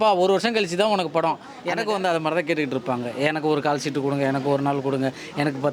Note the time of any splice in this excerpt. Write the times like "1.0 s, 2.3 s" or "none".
1.6 s